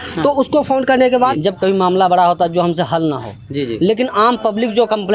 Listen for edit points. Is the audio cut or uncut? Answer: cut